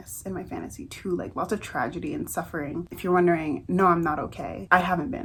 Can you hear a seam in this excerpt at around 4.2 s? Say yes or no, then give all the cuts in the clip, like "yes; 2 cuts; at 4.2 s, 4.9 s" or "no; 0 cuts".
no; 0 cuts